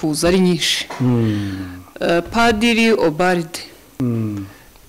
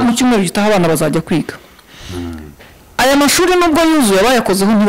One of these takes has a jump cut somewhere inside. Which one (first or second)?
first